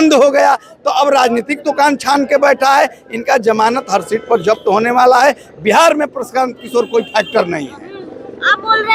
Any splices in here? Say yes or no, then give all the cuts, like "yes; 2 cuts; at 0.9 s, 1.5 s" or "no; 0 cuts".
no; 0 cuts